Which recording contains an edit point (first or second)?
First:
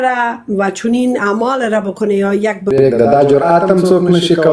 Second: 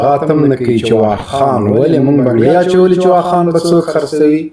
first